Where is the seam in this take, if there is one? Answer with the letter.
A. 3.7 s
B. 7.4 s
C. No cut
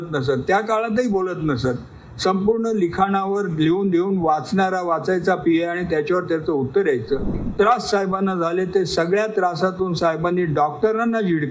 B